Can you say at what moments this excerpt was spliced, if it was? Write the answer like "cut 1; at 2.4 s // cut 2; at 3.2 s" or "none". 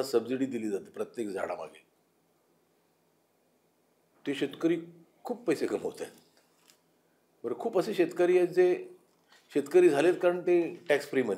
none